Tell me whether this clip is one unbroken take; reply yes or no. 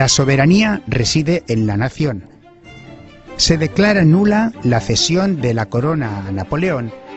yes